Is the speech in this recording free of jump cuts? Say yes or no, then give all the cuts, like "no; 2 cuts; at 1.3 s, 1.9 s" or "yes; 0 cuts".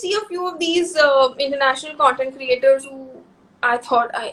yes; 0 cuts